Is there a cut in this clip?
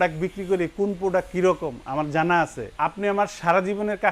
yes; 1 cut; at 2.7 s

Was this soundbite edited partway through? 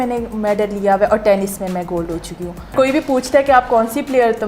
yes; 1 cut; at 2.7 s

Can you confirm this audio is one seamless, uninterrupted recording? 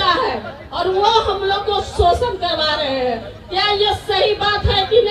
yes; 0 cuts

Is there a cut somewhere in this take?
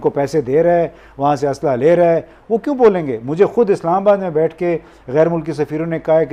no; 0 cuts

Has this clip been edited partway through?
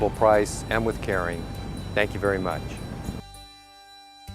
yes; 1 cut; at 3.3 s

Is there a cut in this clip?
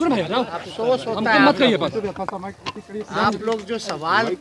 no; 0 cuts

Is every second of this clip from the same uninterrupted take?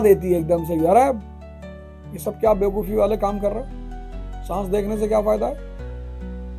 no; 1 cut; at 5.6 s

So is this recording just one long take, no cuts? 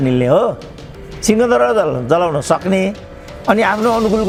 yes; 0 cuts

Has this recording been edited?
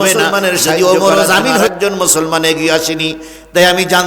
yes; 1 cut; at 1.7 s

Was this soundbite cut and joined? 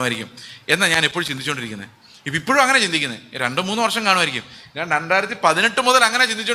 no; 0 cuts

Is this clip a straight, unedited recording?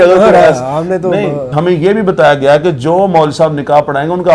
no; 1 cut; at 1.5 s

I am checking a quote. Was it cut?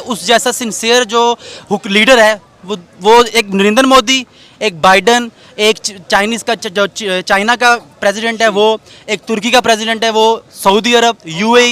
no; 0 cuts

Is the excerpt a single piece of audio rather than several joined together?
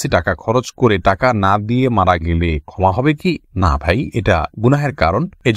yes; 0 cuts

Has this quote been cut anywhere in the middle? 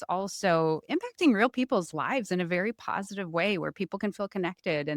no; 0 cuts

